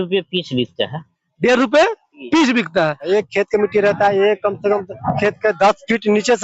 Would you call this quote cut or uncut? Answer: cut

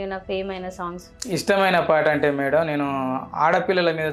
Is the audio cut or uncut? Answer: cut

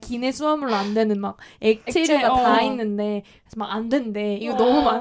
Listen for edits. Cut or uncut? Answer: uncut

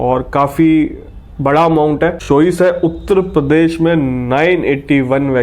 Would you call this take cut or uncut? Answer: cut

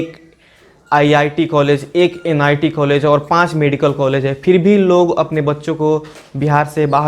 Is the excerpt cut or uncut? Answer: uncut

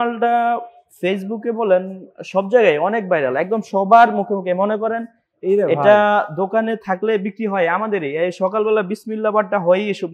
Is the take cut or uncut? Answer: uncut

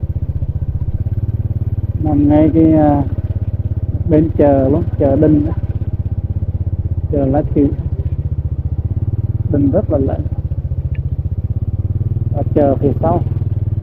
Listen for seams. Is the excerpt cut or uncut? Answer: uncut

